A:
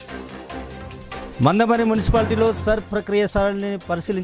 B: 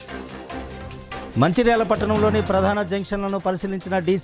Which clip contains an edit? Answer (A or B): B